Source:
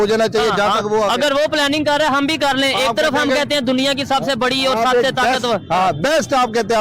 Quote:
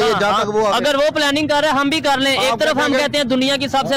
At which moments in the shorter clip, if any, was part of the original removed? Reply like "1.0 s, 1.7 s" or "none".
none